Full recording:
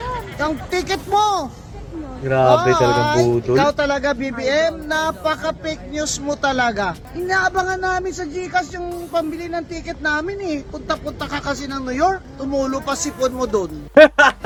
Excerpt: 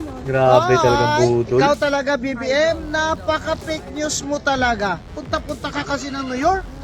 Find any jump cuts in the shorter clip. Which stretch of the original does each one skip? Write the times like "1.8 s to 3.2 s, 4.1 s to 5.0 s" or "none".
7.1 s to 10.7 s